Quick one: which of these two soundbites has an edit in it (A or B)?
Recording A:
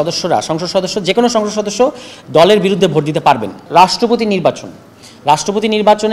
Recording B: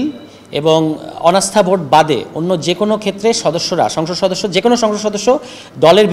A